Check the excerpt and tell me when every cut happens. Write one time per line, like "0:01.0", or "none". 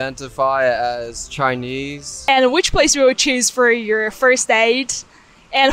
0:02.1